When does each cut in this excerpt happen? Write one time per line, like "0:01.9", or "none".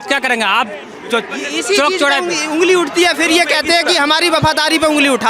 none